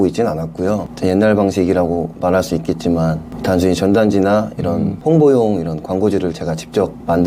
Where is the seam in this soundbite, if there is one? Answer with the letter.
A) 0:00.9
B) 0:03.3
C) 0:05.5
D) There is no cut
D